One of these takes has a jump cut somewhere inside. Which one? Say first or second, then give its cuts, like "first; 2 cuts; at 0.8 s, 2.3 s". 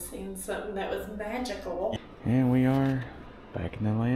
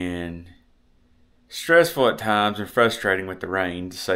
first; 1 cut; at 2.0 s